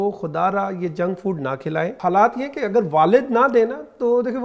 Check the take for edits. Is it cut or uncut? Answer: cut